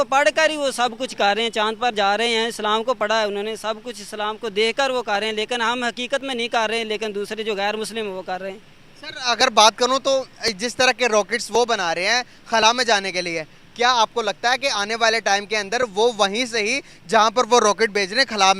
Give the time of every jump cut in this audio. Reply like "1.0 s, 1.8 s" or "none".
none